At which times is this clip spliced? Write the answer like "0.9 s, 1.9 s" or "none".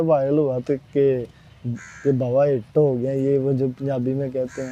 none